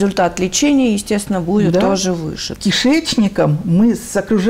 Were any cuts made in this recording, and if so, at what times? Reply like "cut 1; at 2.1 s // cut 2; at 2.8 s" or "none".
cut 1; at 2.5 s